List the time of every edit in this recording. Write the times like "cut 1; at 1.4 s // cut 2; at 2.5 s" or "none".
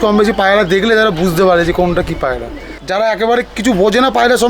cut 1; at 2.8 s